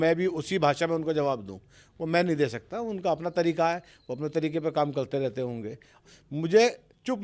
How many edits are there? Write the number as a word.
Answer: one